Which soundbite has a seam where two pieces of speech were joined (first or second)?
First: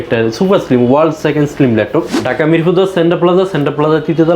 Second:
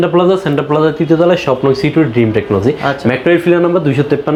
first